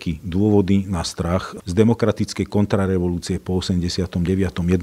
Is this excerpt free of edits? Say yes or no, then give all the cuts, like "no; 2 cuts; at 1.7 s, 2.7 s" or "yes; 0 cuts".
no; 1 cut; at 1.6 s